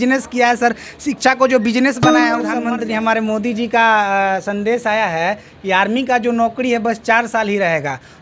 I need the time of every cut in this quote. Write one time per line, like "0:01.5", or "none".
0:02.5